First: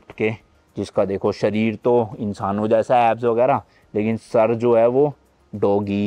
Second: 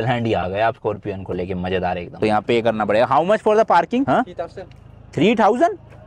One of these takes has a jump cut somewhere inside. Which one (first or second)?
second